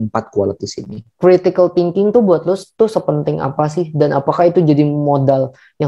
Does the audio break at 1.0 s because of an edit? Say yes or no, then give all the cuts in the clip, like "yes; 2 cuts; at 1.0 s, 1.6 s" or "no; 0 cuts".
yes; 1 cut; at 1.0 s